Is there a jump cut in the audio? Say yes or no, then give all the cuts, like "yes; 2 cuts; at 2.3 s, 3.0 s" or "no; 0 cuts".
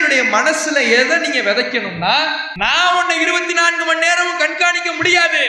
yes; 1 cut; at 2.5 s